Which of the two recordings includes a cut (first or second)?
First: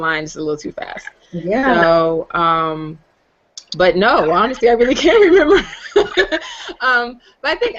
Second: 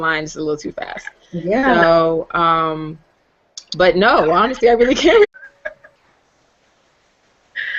first